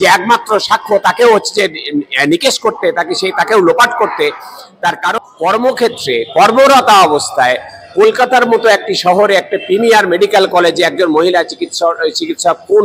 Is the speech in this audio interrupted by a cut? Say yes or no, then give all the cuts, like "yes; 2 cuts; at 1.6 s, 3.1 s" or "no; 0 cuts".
yes; 1 cut; at 5.1 s